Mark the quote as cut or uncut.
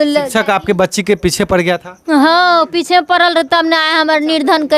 uncut